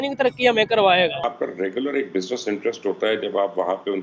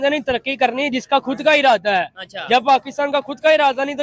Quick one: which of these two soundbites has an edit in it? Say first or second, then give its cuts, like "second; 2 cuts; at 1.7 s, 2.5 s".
first; 1 cut; at 1.2 s